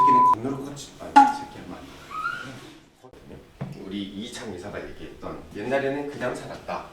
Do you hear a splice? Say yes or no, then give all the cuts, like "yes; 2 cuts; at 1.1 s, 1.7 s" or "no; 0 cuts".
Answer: yes; 1 cut; at 2.9 s